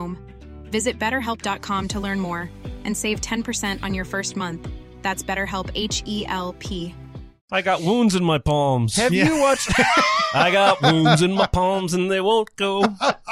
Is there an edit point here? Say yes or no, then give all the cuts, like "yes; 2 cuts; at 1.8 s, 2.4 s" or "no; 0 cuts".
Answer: yes; 1 cut; at 7.5 s